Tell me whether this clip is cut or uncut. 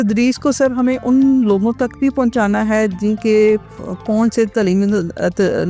uncut